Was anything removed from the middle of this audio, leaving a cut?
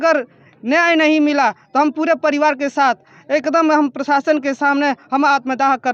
no; 0 cuts

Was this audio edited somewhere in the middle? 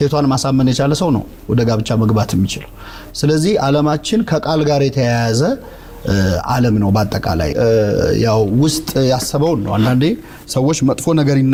no; 0 cuts

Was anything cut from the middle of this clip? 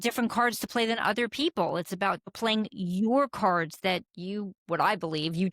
yes; 1 cut; at 2.3 s

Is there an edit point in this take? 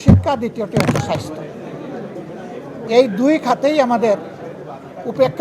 no; 0 cuts

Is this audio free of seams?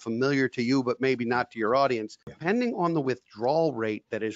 no; 1 cut; at 2.4 s

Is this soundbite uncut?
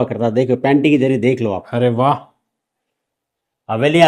yes; 0 cuts

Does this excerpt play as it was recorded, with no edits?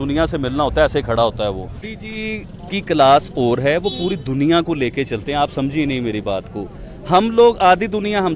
no; 1 cut; at 1.9 s

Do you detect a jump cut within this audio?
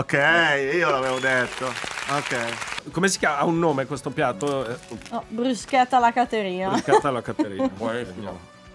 yes; 1 cut; at 2.8 s

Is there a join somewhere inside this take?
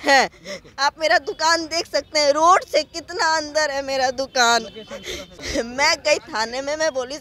yes; 1 cut; at 5.4 s

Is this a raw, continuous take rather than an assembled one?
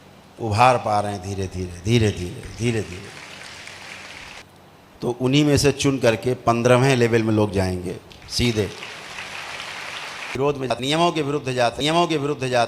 no; 2 cuts; at 4.4 s, 10.3 s

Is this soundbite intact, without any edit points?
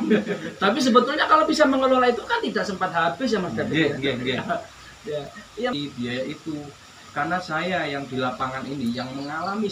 no; 1 cut; at 5.7 s

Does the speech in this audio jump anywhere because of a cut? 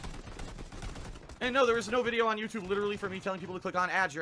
no; 0 cuts

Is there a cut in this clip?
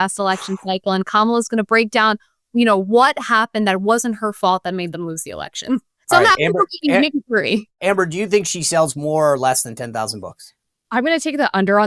yes; 1 cut; at 7.8 s

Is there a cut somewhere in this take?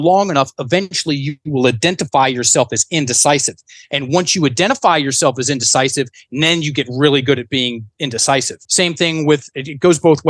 yes; 1 cut; at 8.6 s

